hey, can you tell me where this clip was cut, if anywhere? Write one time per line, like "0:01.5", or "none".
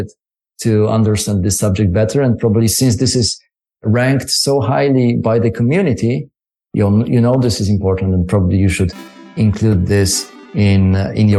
none